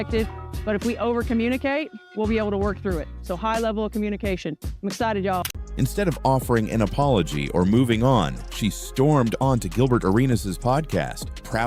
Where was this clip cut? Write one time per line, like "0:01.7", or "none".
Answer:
0:05.6